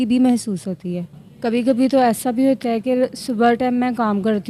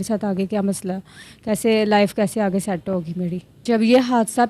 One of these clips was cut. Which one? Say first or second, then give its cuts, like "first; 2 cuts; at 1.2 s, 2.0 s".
second; 1 cut; at 3.6 s